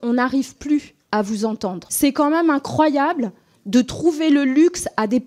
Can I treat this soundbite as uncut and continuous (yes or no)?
no